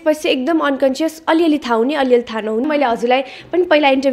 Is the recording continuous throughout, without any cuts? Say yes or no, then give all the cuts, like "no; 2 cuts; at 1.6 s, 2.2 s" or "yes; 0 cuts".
no; 1 cut; at 2.6 s